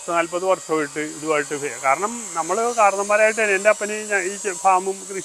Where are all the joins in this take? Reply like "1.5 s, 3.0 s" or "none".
none